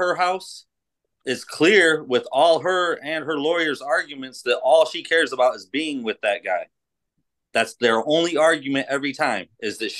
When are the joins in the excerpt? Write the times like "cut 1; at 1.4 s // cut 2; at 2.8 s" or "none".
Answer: none